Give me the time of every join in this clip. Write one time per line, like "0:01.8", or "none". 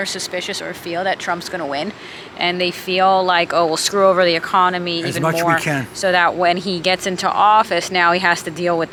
none